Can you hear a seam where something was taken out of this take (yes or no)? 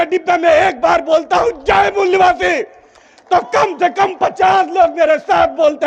no